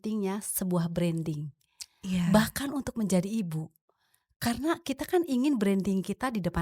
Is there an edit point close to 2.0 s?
no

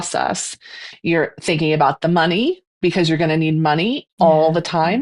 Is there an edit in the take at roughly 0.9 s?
yes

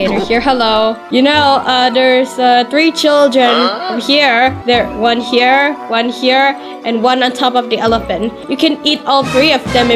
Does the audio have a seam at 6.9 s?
no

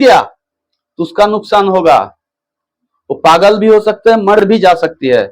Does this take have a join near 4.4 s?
yes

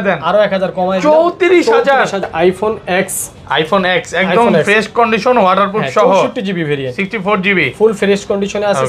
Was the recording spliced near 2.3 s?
yes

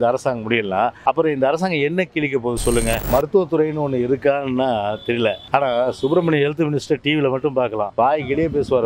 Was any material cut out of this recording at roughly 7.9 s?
yes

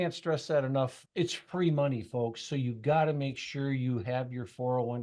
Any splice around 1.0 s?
yes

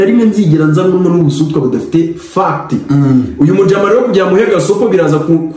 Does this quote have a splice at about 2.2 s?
no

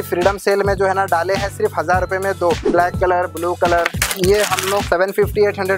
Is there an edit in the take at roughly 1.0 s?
no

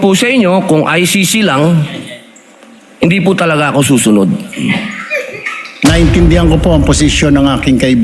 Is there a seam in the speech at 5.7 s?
yes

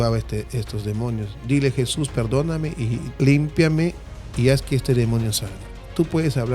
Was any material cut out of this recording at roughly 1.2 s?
no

